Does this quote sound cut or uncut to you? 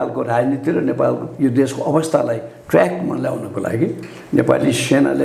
uncut